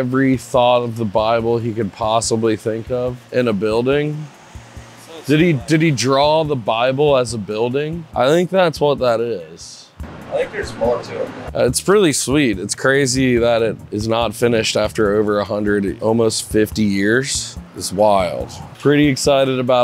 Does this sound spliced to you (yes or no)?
no